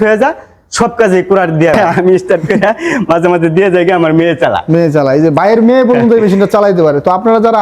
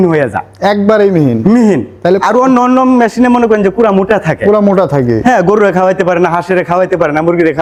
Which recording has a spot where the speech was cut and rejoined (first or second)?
first